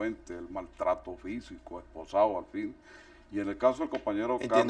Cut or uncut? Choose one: uncut